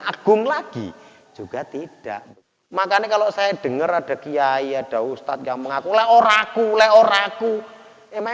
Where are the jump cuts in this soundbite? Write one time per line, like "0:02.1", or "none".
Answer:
0:02.3